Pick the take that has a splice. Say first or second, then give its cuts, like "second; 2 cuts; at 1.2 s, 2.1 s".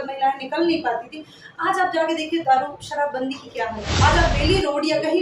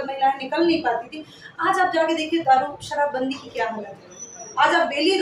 first; 1 cut; at 3.9 s